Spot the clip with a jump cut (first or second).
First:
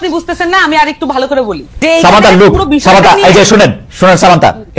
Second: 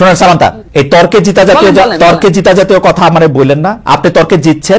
first